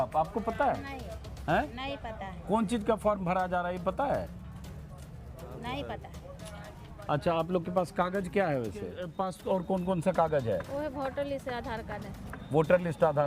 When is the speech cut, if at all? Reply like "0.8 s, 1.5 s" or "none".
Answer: 9.0 s